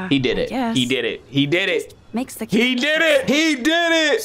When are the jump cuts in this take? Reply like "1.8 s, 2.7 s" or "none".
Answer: 3.2 s